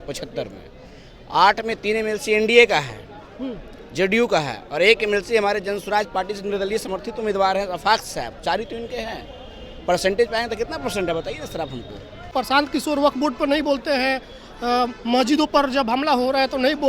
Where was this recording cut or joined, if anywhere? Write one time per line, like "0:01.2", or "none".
0:12.2